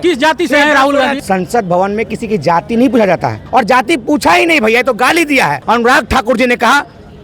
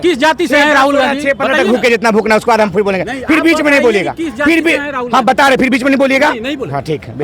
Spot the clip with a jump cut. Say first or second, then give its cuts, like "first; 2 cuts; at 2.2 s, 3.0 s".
first; 3 cuts; at 1.2 s, 3.4 s, 5.6 s